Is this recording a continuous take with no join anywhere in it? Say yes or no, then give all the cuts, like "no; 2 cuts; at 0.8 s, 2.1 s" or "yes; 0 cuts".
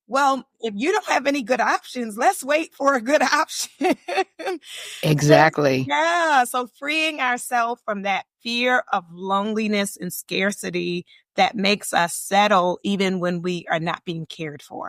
yes; 0 cuts